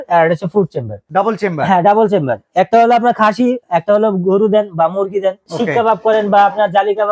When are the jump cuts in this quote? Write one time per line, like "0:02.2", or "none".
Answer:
0:01.0
0:05.4